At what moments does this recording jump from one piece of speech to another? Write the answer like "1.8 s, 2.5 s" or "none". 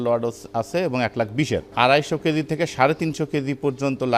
1.7 s